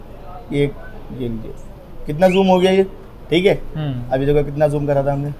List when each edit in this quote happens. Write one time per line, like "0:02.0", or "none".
none